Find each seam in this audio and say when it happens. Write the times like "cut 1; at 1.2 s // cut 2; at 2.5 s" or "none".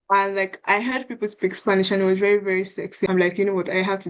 cut 1; at 3.1 s